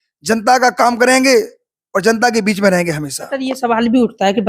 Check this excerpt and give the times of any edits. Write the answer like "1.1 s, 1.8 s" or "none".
3.2 s